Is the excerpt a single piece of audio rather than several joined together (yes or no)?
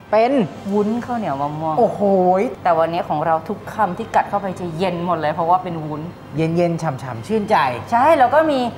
no